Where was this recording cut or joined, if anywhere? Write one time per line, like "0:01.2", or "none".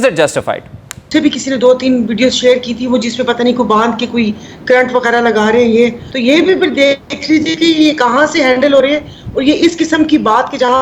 0:01.1
0:06.1